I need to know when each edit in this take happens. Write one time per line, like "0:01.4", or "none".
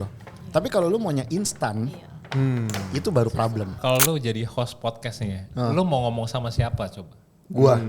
0:03.8